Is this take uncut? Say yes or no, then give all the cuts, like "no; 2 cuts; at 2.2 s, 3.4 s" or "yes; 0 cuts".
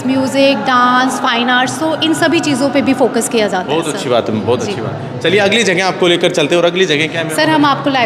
yes; 0 cuts